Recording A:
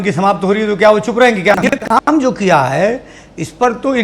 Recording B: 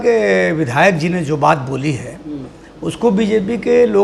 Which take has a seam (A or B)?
A